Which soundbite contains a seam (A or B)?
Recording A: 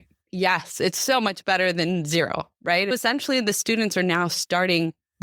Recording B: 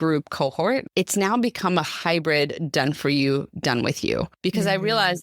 B